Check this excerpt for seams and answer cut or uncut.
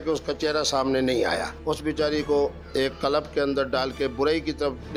cut